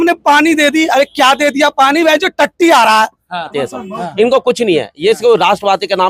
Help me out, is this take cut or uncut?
cut